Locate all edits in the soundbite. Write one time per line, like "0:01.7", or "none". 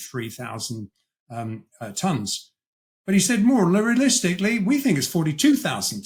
none